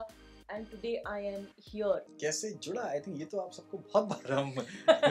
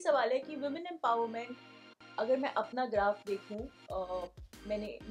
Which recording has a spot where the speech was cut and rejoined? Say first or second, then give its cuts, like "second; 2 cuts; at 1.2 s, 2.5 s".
first; 1 cut; at 2.1 s